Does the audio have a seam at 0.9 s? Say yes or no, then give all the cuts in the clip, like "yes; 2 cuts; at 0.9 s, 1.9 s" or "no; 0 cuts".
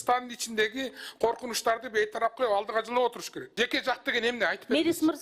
no; 1 cut; at 3.5 s